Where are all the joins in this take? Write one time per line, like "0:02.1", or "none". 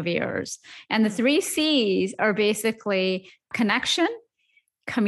0:03.5